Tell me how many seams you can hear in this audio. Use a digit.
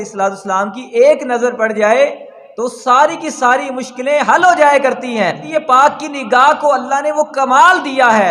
1